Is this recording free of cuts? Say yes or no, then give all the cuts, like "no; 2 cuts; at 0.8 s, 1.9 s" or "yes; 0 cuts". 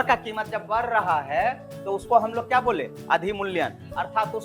yes; 0 cuts